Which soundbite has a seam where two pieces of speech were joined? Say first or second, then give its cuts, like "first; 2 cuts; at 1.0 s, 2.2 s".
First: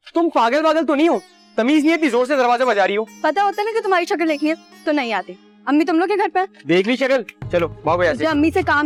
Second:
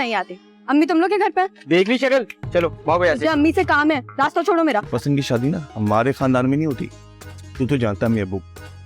second; 1 cut; at 4.9 s